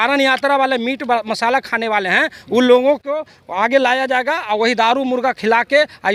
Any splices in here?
no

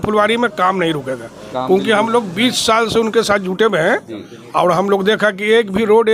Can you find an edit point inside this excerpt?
no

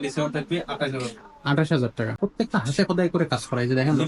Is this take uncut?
no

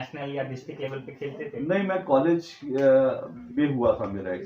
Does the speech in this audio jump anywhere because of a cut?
no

